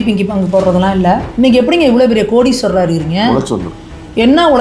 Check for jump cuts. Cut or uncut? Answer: cut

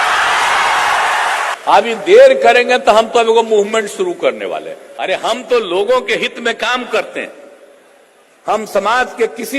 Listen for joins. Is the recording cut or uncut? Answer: cut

